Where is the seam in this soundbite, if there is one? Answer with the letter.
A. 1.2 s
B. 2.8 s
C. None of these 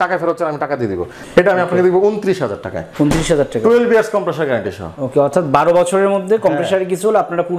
A